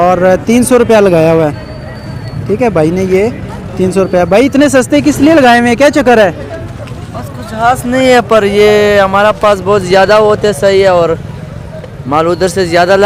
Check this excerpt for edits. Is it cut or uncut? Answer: uncut